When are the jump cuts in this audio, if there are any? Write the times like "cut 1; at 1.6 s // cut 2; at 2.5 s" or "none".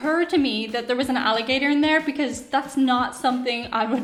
none